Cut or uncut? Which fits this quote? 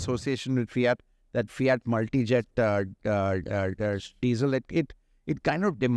uncut